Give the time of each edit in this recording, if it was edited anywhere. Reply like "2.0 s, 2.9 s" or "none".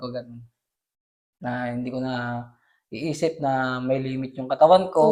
none